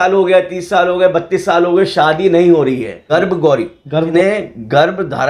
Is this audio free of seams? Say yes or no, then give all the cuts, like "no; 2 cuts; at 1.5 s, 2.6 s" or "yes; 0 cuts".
no; 2 cuts; at 3.0 s, 4.1 s